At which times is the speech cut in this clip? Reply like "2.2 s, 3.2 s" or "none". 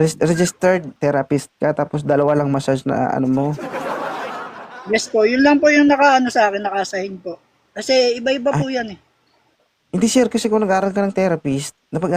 0.9 s